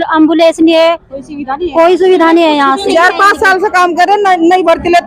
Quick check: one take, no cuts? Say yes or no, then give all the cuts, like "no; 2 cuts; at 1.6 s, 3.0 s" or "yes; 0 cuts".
no; 1 cut; at 2.9 s